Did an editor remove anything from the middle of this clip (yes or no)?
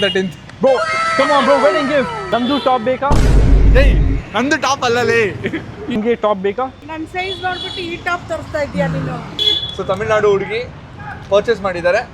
yes